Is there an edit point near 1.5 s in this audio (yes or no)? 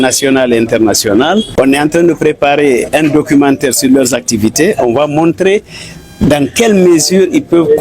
yes